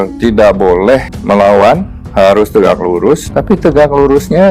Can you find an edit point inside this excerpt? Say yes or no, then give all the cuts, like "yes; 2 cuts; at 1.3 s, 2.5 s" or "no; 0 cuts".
yes; 3 cuts; at 1.1 s, 2.0 s, 3.3 s